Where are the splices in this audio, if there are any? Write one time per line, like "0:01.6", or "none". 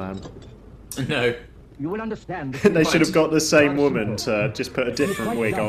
none